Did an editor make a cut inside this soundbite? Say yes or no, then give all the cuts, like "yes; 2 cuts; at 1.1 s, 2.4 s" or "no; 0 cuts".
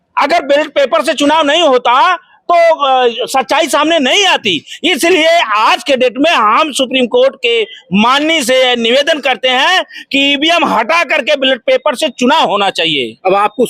no; 0 cuts